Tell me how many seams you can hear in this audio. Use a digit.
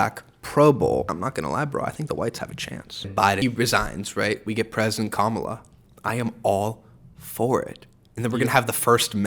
2